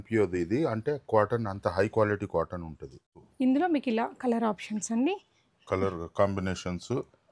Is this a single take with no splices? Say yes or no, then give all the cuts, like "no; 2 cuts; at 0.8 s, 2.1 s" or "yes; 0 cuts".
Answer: no; 1 cut; at 3.0 s